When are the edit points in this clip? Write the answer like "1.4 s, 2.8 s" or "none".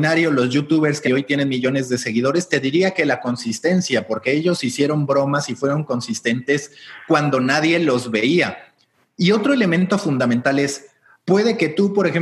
1.0 s